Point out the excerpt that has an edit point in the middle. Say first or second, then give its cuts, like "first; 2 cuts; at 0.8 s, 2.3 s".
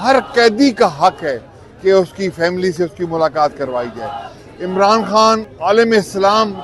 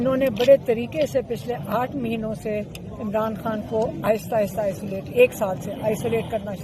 first; 1 cut; at 5.5 s